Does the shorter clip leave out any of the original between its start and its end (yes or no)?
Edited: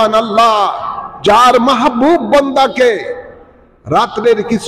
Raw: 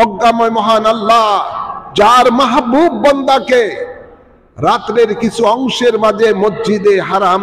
no